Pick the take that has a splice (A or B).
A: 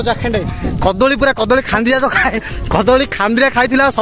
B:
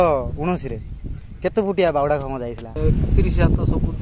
B